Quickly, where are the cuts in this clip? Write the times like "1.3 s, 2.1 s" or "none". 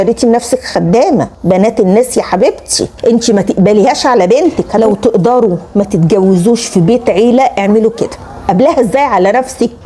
2.9 s, 4.7 s, 8.4 s